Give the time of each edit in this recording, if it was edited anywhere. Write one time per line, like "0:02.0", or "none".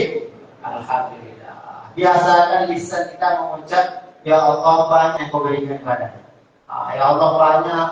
0:05.2